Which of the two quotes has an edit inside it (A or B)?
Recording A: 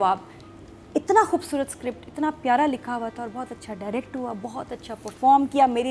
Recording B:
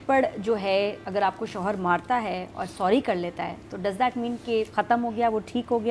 B